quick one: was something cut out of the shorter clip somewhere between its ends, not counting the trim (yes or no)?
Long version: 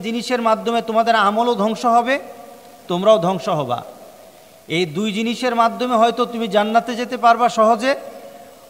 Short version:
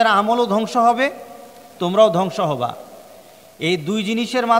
no